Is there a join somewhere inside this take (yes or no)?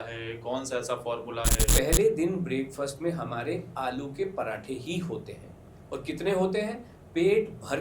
yes